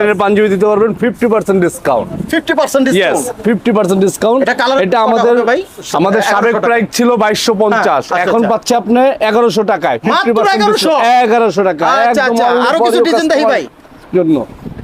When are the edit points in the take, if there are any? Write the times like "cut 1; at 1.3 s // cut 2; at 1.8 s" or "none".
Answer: none